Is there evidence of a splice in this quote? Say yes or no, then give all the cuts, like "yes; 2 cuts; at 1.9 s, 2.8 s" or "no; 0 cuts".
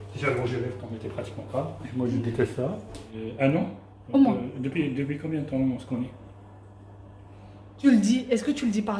yes; 2 cuts; at 3.0 s, 7.7 s